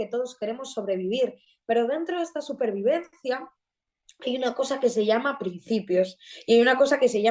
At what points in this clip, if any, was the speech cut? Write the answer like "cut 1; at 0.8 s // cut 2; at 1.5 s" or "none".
none